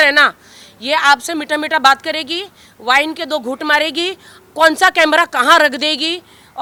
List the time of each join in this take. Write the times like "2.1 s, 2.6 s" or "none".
none

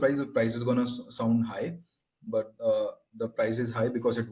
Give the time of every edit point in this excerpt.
none

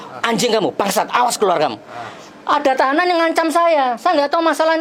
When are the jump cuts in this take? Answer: none

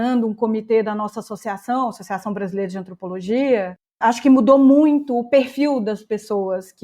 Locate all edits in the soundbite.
4.0 s

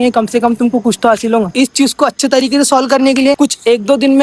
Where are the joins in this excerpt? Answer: 1.5 s, 3.4 s

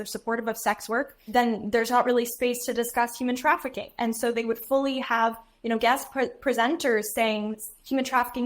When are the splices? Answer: 1.2 s

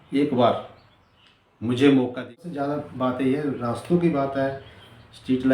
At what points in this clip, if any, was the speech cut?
2.5 s

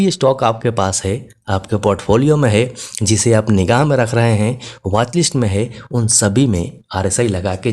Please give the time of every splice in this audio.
none

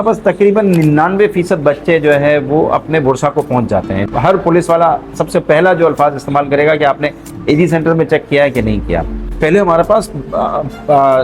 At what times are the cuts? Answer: 4.0 s, 9.2 s

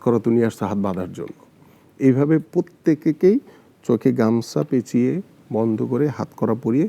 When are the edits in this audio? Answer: 2.5 s

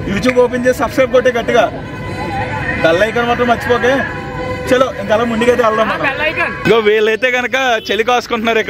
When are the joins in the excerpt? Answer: 6.5 s

